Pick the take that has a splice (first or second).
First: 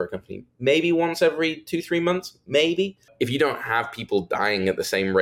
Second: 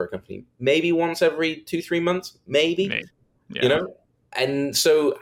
first